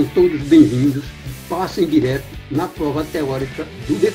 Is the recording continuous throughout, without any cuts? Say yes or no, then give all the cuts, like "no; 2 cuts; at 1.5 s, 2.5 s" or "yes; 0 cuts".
yes; 0 cuts